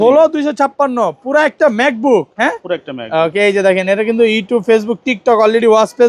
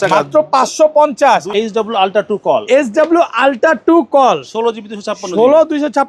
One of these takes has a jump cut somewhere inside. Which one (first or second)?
second